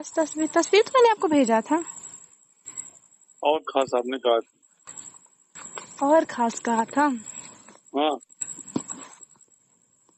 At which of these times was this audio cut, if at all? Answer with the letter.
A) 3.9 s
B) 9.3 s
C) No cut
A